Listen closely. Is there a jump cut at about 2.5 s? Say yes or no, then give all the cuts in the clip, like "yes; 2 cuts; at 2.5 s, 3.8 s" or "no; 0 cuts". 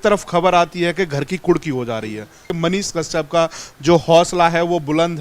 yes; 1 cut; at 2.5 s